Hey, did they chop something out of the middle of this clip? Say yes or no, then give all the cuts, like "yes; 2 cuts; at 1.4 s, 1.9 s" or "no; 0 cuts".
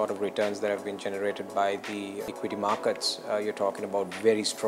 yes; 1 cut; at 2.2 s